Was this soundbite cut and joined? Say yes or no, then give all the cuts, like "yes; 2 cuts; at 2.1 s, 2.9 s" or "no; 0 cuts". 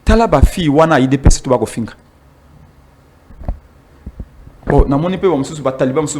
no; 0 cuts